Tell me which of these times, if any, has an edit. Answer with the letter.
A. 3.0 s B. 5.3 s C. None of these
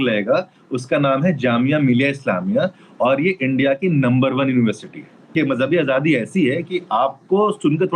B